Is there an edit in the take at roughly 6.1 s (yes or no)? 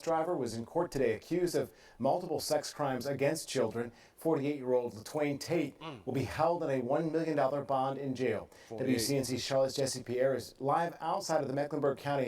yes